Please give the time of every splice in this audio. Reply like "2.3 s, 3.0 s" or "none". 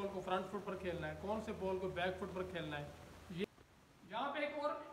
3.4 s

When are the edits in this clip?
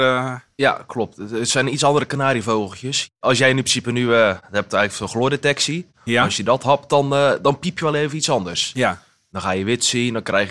3.2 s

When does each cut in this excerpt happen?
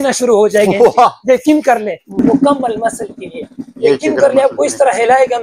2.1 s

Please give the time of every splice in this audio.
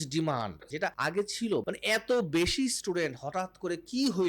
1.0 s, 1.6 s

